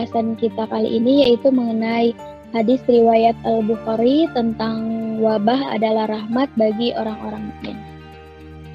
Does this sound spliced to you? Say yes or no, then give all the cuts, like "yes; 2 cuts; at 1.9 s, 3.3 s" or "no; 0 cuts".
yes; 1 cut; at 7.8 s